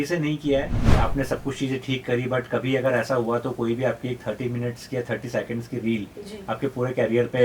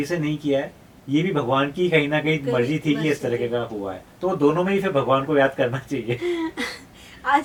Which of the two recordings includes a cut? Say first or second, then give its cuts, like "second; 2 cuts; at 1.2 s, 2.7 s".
first; 1 cut; at 1.0 s